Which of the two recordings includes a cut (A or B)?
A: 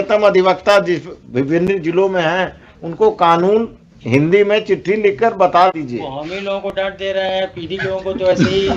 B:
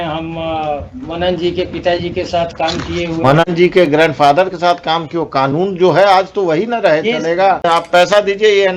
B